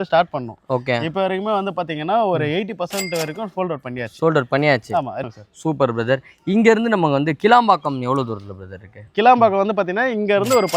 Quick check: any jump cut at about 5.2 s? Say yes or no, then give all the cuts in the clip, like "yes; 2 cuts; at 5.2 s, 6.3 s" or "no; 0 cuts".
yes; 1 cut; at 5.2 s